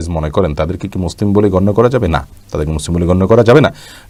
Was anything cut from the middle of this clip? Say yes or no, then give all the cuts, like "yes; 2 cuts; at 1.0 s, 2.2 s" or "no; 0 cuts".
no; 0 cuts